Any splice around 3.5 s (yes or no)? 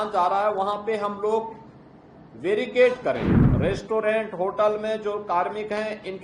yes